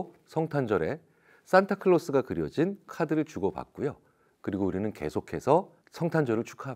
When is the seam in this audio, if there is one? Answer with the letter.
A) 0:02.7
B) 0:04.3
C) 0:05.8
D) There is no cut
C